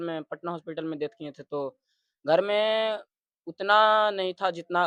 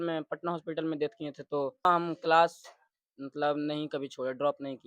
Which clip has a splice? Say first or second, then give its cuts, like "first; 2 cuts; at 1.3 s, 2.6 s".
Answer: second; 1 cut; at 1.8 s